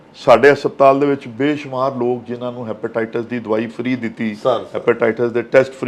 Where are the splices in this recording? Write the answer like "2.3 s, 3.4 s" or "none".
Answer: none